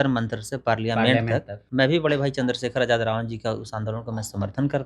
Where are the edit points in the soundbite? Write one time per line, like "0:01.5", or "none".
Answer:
0:01.6